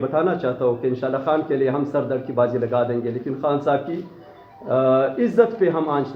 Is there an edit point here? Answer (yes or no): no